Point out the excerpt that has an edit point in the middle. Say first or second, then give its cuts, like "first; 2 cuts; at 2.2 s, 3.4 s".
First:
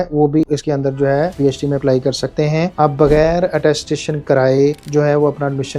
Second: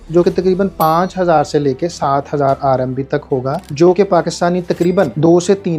first; 1 cut; at 2.7 s